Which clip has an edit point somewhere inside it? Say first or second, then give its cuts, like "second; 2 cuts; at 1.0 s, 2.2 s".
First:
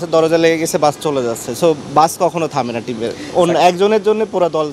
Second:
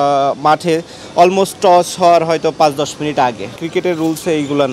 second; 1 cut; at 3.6 s